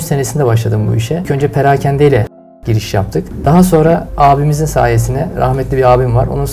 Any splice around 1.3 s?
yes; 3 cuts; at 1.3 s, 3.0 s, 4.1 s

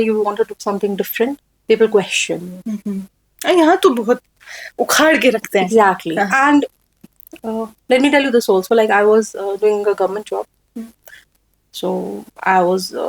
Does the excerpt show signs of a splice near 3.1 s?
no; 0 cuts

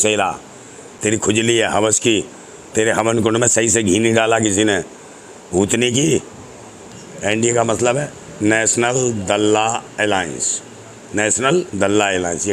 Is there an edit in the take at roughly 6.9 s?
yes; 2 cuts; at 0.9 s, 6.9 s

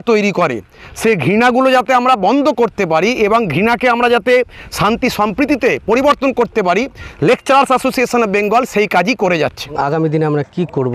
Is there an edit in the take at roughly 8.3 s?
no; 1 cut; at 9.8 s

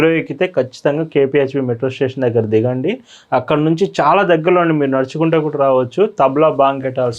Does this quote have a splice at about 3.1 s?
no; 0 cuts

